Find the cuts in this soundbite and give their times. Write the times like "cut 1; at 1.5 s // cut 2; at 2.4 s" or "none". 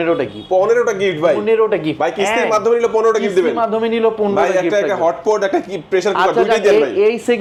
none